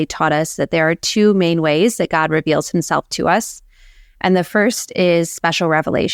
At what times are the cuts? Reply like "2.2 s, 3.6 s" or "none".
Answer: none